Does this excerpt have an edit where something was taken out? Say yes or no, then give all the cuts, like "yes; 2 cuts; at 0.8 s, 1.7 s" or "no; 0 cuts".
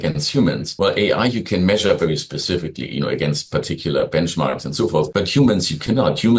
no; 0 cuts